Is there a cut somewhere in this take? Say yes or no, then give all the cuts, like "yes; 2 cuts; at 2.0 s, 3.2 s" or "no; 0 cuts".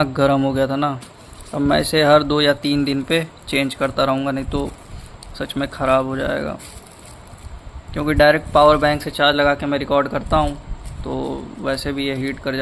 no; 0 cuts